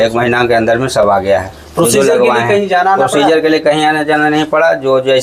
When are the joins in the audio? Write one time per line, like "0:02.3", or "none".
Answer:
none